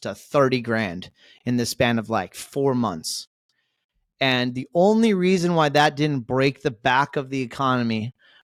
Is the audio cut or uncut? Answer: uncut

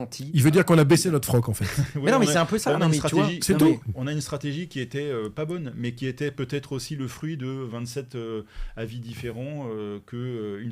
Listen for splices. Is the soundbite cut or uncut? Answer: uncut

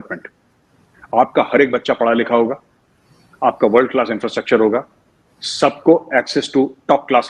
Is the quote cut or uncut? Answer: uncut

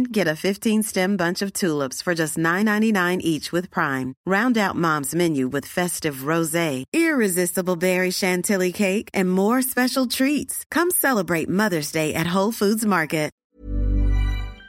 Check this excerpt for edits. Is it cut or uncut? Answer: cut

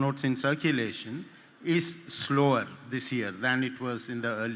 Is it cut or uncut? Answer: uncut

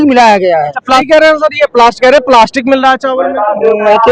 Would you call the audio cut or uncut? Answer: cut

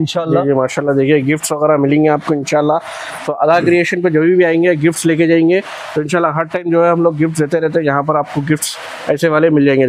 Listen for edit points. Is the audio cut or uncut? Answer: uncut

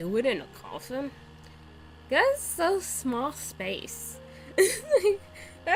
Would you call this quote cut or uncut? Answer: uncut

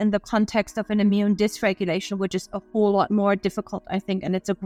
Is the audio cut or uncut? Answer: uncut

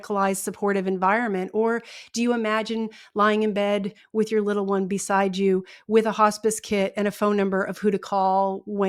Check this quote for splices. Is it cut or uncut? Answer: uncut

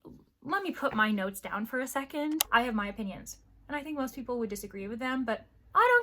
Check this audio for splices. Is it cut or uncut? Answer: cut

